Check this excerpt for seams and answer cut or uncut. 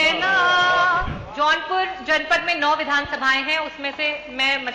cut